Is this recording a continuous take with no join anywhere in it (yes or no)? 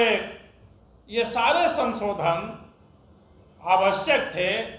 yes